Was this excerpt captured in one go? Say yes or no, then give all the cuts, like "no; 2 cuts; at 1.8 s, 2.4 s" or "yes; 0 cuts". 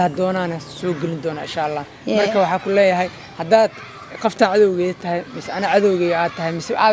yes; 0 cuts